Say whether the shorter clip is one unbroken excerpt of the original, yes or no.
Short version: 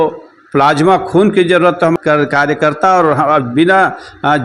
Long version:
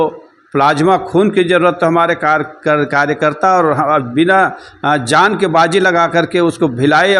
no